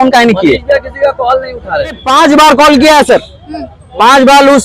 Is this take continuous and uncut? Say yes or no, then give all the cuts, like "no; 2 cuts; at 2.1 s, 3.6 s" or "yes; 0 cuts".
no; 1 cut; at 2.0 s